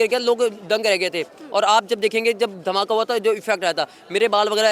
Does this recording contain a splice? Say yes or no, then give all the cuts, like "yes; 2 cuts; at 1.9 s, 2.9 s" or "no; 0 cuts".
no; 0 cuts